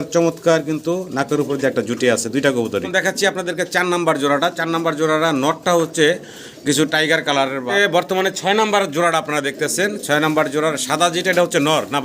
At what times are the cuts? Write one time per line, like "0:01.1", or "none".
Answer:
0:02.9
0:07.7